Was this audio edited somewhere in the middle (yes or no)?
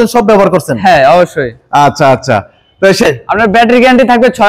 yes